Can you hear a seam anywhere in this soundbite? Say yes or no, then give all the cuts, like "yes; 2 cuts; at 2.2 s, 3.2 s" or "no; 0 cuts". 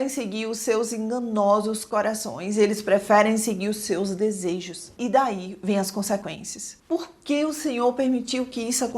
yes; 1 cut; at 6.7 s